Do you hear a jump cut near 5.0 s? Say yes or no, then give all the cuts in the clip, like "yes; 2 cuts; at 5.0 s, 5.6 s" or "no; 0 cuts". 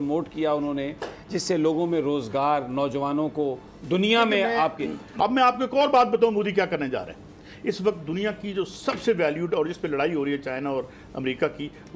yes; 1 cut; at 5.0 s